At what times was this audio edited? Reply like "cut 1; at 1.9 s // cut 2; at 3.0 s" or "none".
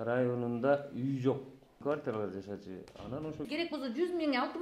cut 1; at 1.8 s // cut 2; at 3.5 s